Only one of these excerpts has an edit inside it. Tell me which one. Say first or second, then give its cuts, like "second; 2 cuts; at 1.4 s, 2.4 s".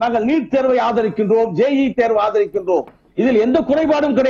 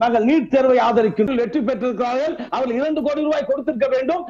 second; 1 cut; at 1.3 s